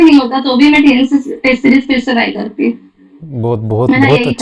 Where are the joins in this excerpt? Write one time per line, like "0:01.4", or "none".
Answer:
none